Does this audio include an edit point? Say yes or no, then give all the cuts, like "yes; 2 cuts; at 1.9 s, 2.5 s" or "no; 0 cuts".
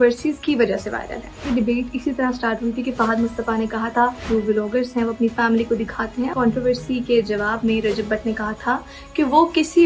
yes; 3 cuts; at 1.5 s, 4.2 s, 6.3 s